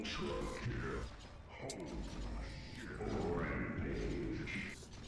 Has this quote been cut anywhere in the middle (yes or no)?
yes